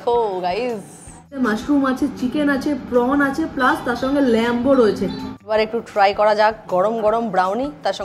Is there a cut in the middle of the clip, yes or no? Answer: yes